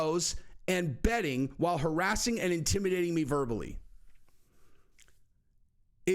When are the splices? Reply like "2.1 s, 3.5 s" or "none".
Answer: none